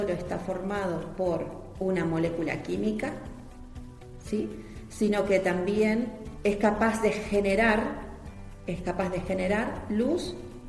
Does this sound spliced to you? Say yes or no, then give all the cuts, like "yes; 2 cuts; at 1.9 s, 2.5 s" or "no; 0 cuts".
yes; 2 cuts; at 1.8 s, 6.2 s